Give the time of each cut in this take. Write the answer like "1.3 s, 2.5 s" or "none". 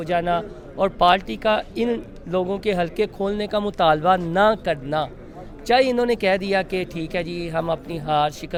none